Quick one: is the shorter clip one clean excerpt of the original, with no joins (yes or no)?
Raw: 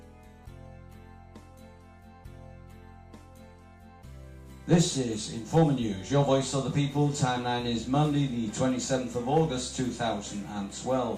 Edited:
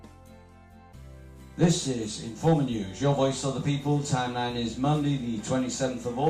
no